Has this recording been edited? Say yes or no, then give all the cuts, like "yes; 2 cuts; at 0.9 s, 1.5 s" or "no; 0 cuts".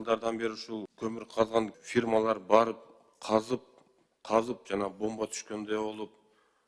yes; 2 cuts; at 0.9 s, 1.8 s